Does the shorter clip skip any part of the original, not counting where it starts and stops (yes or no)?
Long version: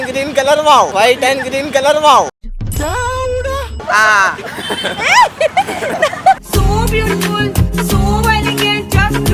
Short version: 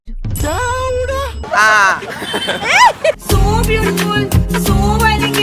yes